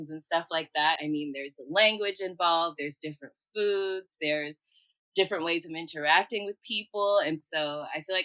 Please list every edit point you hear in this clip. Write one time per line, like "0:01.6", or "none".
0:01.0
0:07.5